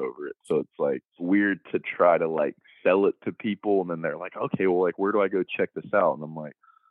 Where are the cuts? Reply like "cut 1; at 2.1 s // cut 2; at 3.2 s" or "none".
cut 1; at 1.2 s